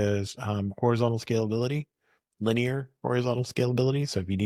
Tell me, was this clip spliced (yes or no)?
no